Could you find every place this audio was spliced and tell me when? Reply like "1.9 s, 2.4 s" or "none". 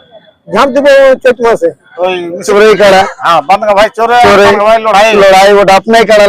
2.5 s